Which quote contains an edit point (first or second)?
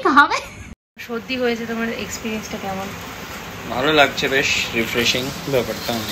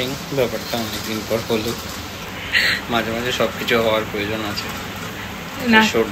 first